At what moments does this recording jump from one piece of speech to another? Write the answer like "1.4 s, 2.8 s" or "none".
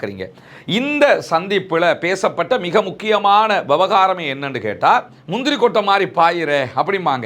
5.1 s